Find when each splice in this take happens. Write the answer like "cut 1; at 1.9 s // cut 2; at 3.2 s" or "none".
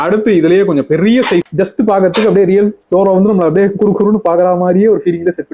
cut 1; at 1.5 s